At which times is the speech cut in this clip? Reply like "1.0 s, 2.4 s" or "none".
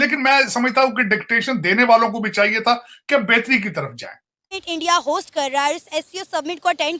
4.6 s